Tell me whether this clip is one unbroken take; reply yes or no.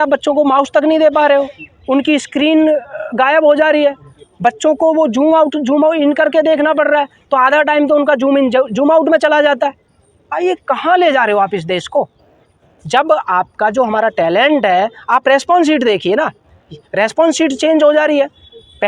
yes